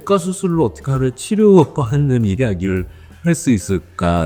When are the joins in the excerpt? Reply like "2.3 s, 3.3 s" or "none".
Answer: none